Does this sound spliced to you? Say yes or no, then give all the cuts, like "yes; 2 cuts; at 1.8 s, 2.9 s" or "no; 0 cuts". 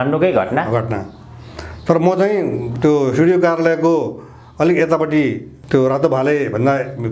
yes; 2 cuts; at 2.7 s, 5.5 s